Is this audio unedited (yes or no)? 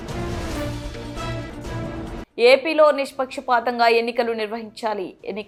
yes